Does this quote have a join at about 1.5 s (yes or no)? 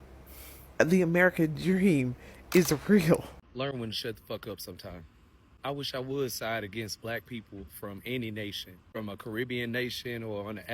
no